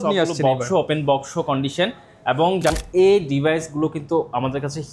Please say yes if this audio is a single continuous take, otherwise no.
no